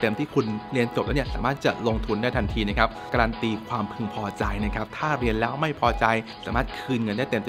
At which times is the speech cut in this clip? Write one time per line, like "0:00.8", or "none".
0:03.1
0:06.4